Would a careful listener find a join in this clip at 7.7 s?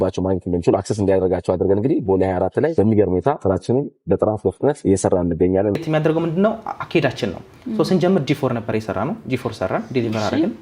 no; 4 cuts; at 2.7 s, 3.4 s, 4.8 s, 5.8 s

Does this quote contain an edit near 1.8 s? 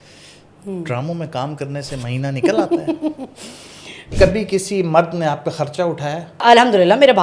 no; 2 cuts; at 4.1 s, 6.4 s

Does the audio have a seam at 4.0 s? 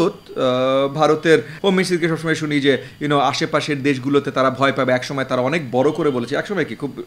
no; 1 cut; at 1.5 s

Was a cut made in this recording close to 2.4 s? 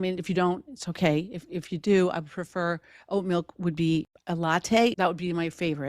no; 2 cuts; at 4.2 s, 4.9 s

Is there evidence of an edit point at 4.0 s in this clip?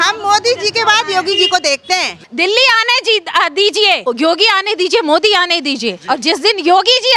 yes; 2 cuts; at 2.2 s, 4.0 s

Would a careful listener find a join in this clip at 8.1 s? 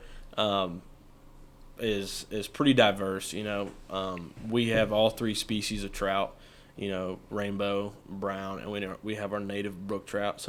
no; 0 cuts

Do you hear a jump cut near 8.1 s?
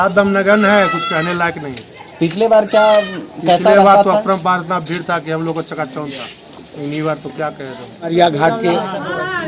yes; 1 cut; at 8.1 s

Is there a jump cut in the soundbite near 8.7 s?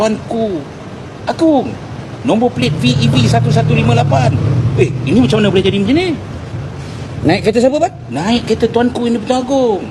no; 0 cuts

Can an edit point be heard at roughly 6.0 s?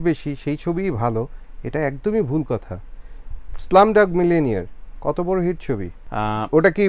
yes; 1 cut; at 6.0 s

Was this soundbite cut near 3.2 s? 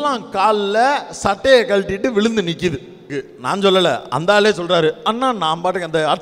yes; 1 cut; at 3.2 s

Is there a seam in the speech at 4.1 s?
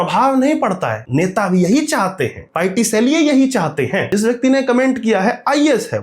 yes; 2 cuts; at 1.0 s, 4.1 s

